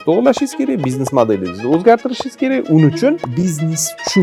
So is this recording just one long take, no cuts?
no; 1 cut; at 3.3 s

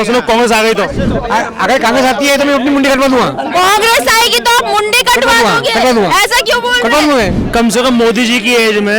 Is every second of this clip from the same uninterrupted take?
no; 2 cuts; at 1.1 s, 7.4 s

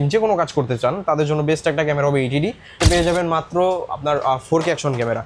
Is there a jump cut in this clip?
yes; 1 cut; at 2.8 s

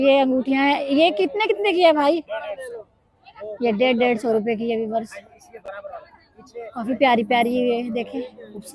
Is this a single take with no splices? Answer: yes; 0 cuts

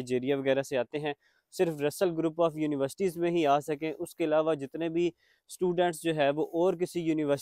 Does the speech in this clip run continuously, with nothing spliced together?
yes; 0 cuts

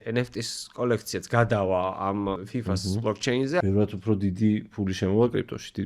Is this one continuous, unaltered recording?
no; 2 cuts; at 2.4 s, 3.6 s

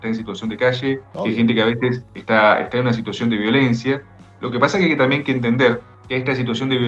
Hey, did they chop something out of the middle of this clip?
yes; 2 cuts; at 1.1 s, 5.9 s

